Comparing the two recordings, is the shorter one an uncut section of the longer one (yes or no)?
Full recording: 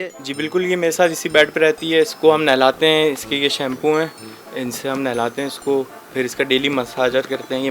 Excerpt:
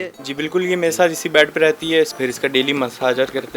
no